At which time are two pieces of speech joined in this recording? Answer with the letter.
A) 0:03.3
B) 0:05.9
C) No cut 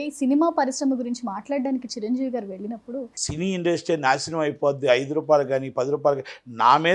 A